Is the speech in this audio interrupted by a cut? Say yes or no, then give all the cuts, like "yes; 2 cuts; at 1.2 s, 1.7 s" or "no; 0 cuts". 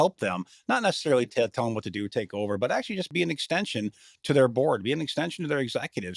yes; 1 cut; at 3.1 s